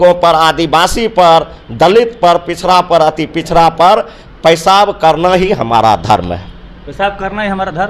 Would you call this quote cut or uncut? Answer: uncut